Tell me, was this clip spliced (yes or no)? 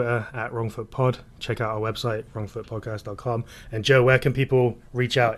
no